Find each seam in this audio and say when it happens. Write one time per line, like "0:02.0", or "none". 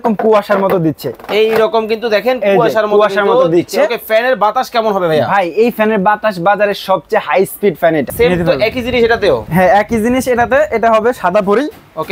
0:08.1